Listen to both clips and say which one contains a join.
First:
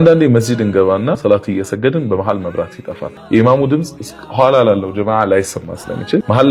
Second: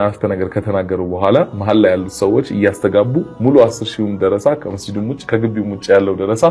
first; 2 cuts; at 1.2 s, 3.2 s

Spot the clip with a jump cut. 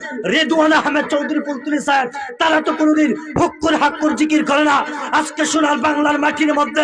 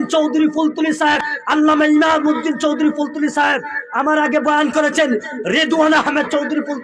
second; 1 cut; at 1.3 s

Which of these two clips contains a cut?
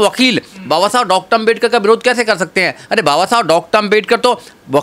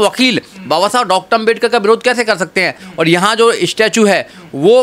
second; 1 cut; at 2.8 s

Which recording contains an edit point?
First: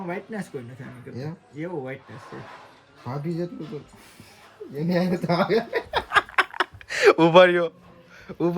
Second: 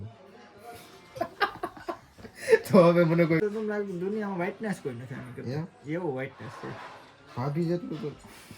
second; 1 cut; at 3.4 s

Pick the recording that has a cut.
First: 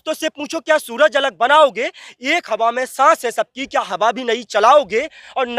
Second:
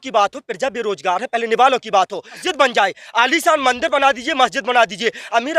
second; 1 cut; at 2.5 s

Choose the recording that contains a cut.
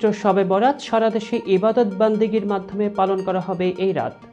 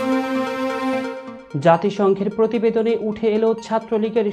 second; 1 cut; at 1.3 s

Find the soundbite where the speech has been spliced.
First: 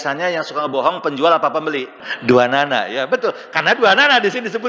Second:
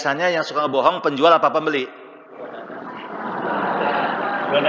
first; 1 cut; at 2.1 s

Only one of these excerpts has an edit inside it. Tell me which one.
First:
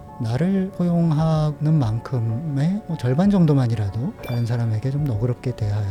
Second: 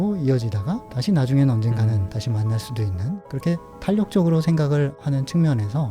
second; 2 cuts; at 3.2 s, 5.0 s

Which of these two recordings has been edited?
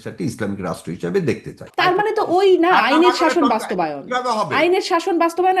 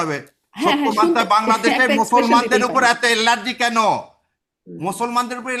first; 1 cut; at 1.6 s

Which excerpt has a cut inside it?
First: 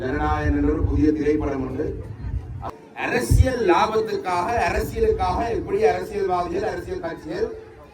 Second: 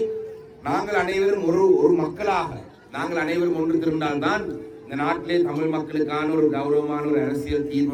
first; 1 cut; at 2.6 s

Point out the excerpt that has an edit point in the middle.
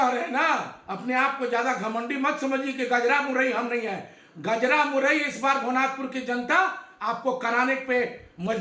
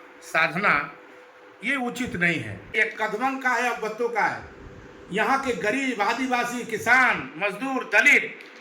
second; 1 cut; at 2.7 s

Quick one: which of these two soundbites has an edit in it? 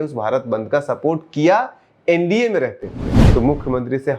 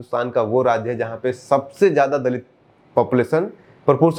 first; 1 cut; at 3.1 s

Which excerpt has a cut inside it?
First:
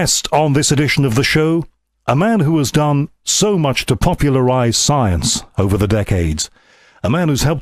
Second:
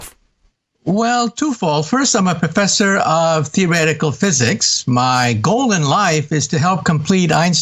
second; 1 cut; at 2.5 s

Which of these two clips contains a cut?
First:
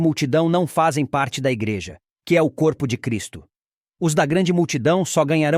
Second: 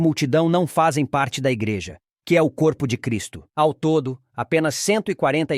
first; 1 cut; at 3.4 s

